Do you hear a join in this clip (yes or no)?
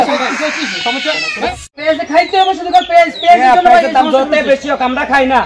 yes